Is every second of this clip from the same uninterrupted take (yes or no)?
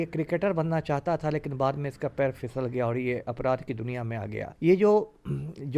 no